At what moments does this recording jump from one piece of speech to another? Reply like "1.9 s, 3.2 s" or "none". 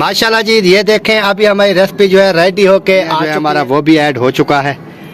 3.3 s